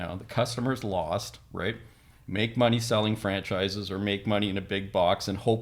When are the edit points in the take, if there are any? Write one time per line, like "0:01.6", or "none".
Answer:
none